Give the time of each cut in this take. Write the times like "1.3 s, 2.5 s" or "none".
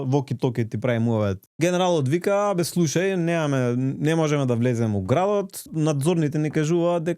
1.4 s, 5.6 s